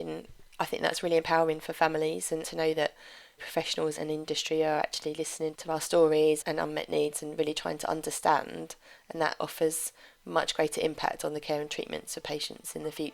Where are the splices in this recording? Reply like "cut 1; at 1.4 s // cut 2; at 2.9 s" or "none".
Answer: cut 1; at 2.5 s // cut 2; at 3.9 s // cut 3; at 6.4 s // cut 4; at 9.4 s